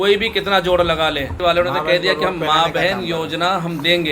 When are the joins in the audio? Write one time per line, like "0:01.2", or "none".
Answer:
0:01.4

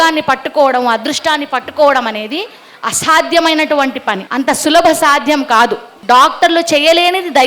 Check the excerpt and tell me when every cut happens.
0:04.2
0:05.9

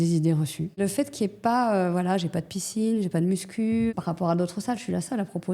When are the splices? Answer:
0:00.8
0:03.9

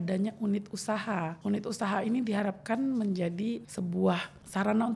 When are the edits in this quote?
0:03.6

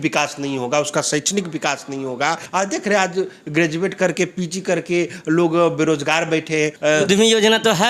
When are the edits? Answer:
0:02.4
0:06.7

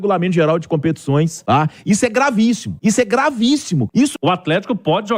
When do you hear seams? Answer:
0:01.4
0:02.7
0:04.0

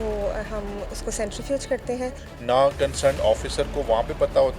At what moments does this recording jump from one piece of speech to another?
0:02.3

